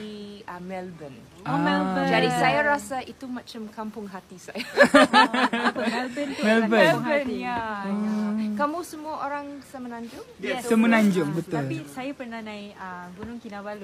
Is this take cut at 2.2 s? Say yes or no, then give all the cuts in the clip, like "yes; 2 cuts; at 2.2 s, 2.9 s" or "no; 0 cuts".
no; 0 cuts